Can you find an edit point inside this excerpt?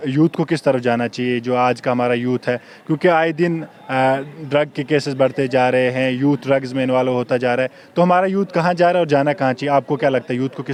no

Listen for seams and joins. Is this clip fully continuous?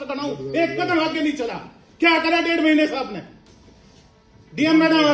yes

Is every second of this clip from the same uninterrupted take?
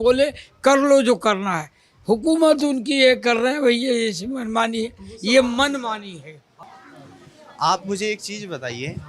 no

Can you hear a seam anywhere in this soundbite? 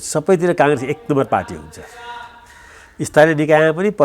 no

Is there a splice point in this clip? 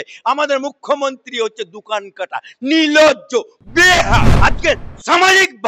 yes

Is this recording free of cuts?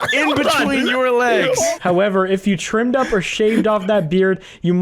no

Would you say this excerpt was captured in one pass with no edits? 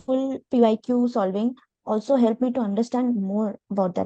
yes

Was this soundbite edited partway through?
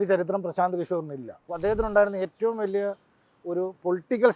yes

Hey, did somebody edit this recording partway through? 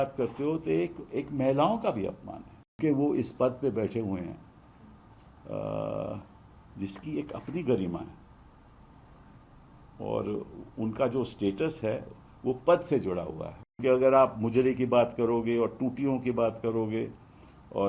yes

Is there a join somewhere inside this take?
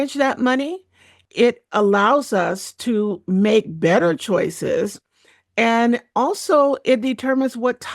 yes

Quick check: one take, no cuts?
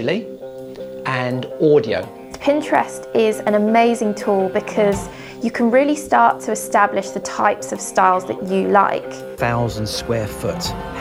no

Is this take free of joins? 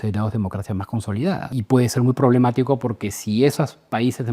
no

